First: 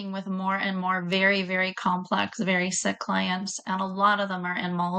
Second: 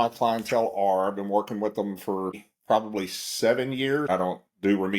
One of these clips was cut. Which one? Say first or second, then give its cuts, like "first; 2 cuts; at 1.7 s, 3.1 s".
second; 2 cuts; at 2.5 s, 4.1 s